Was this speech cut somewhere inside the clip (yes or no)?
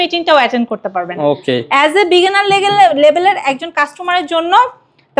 no